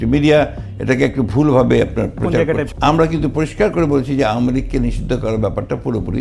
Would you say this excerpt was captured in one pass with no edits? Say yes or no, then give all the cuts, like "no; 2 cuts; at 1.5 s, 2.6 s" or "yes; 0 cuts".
no; 1 cut; at 2.7 s